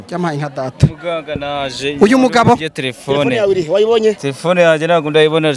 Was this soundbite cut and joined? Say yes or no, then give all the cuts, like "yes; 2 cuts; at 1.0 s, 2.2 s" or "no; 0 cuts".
no; 0 cuts